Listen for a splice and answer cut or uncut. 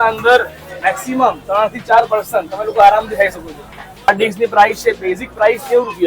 cut